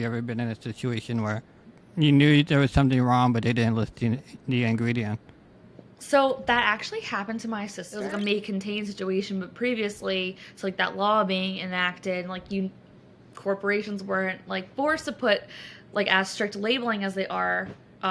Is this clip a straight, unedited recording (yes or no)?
no